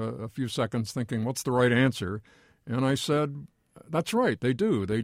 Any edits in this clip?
no; 0 cuts

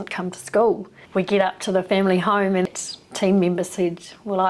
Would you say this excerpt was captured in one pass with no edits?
no; 2 cuts; at 0.9 s, 2.7 s

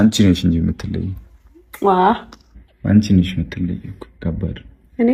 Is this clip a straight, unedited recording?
yes; 0 cuts

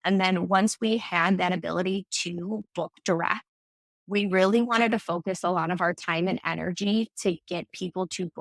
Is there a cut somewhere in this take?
no; 0 cuts

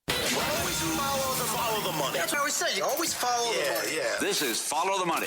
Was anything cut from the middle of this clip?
yes; 1 cut; at 2.3 s

